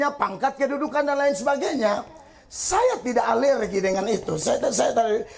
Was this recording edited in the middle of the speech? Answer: no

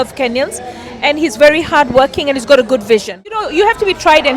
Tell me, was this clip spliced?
yes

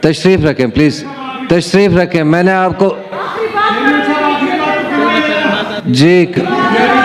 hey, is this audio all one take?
yes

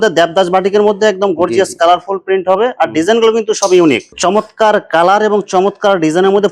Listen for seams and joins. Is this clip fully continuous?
no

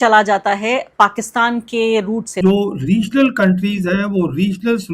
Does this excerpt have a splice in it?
no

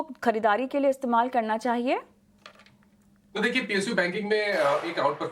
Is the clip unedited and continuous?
yes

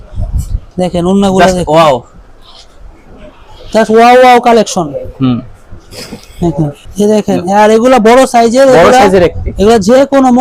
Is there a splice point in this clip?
yes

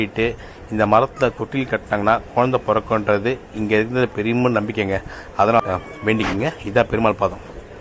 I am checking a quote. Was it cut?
yes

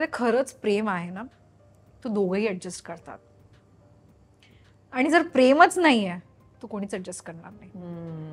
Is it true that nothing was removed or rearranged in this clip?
yes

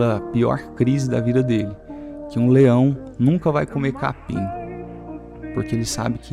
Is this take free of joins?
yes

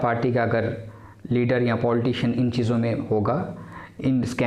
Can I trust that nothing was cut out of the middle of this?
yes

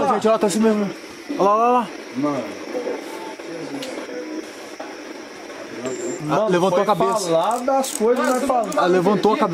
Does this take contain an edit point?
no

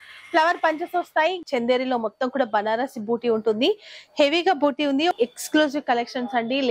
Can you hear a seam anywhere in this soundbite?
yes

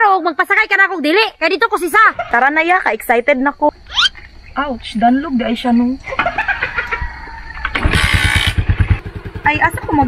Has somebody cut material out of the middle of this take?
yes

